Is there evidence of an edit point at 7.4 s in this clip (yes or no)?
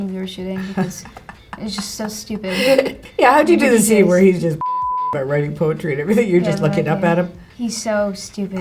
yes